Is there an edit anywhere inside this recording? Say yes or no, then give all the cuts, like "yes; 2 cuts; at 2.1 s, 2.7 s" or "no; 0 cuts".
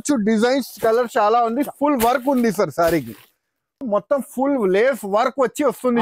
yes; 1 cut; at 3.8 s